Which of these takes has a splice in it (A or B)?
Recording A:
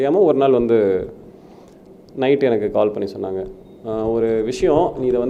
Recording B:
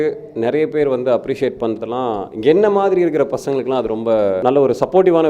B